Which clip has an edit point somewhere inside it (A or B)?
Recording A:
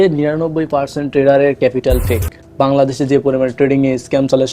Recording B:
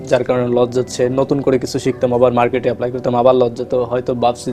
A